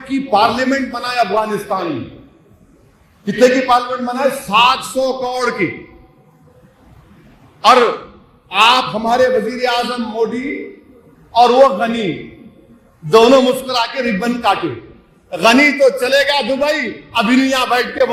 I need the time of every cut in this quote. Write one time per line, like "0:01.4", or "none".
none